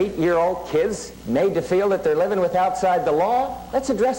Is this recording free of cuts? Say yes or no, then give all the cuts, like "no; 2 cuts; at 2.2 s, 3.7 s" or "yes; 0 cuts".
no; 1 cut; at 1.1 s